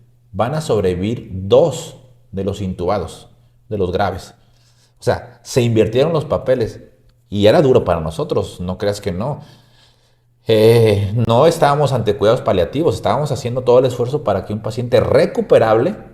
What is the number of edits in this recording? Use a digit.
0